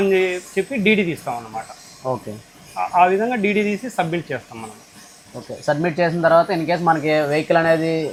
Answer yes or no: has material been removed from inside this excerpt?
no